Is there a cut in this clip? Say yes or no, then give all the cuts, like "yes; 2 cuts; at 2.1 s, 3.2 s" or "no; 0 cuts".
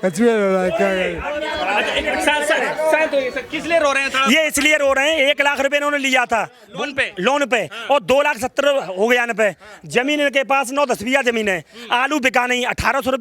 no; 0 cuts